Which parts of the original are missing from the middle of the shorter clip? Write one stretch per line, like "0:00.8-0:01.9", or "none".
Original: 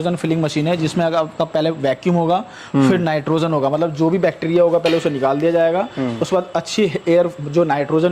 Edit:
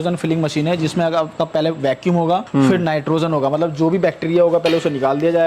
0:02.5-0:02.7